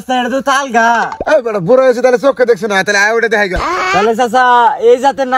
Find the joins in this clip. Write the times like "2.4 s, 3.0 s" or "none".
3.8 s